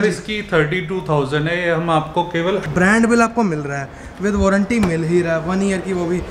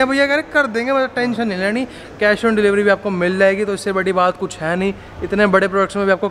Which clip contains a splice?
first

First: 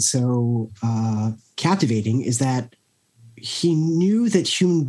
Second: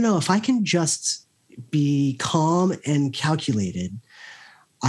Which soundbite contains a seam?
first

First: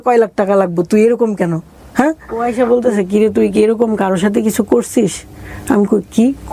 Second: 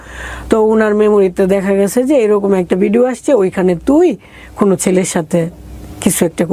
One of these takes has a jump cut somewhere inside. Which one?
first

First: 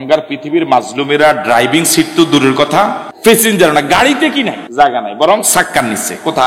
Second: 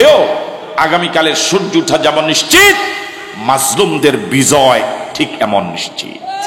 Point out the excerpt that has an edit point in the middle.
first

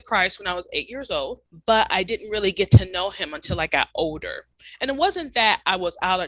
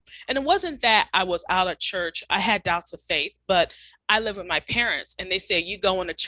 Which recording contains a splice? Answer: first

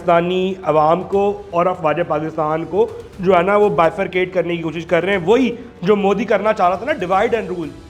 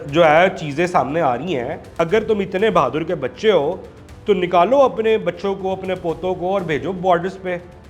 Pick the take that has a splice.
second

